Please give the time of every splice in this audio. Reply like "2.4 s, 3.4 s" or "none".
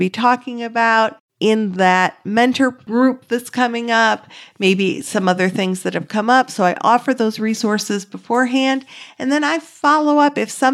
1.2 s, 2.8 s